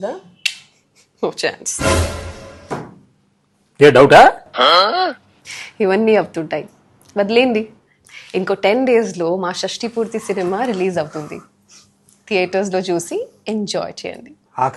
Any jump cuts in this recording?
no; 0 cuts

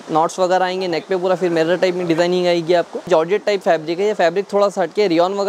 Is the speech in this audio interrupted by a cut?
yes; 1 cut; at 3.1 s

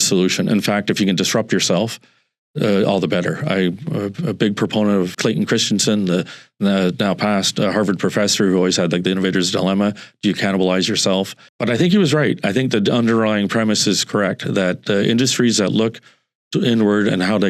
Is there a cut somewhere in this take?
no; 0 cuts

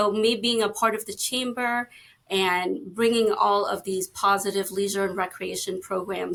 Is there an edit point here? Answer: no; 0 cuts

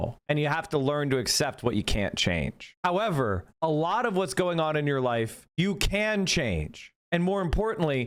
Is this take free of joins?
yes; 0 cuts

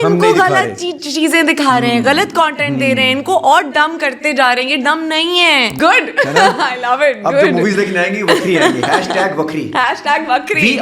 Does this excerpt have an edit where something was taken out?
yes; 1 cut; at 5.8 s

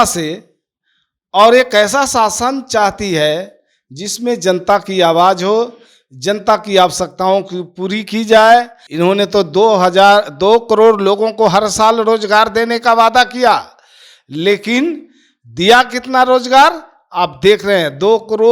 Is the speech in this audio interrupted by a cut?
yes; 1 cut; at 8.8 s

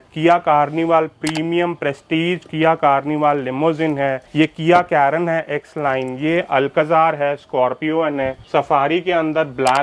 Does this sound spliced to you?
no; 0 cuts

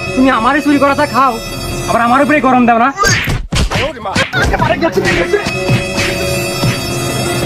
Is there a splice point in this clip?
yes; 1 cut; at 4.2 s

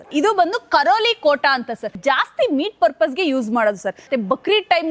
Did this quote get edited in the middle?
yes; 2 cuts; at 2.0 s, 4.1 s

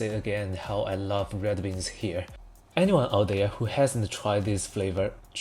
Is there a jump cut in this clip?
no; 0 cuts

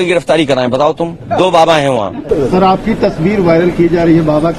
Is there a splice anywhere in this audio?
yes; 2 cuts; at 1.2 s, 2.2 s

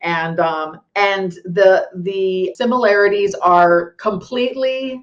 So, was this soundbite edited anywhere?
yes; 1 cut; at 2.5 s

